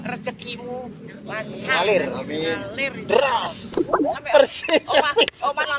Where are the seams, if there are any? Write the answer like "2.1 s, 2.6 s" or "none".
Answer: 4.1 s